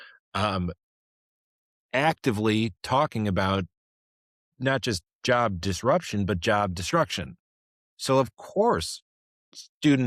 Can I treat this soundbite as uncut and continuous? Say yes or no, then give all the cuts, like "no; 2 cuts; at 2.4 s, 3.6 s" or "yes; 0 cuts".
yes; 0 cuts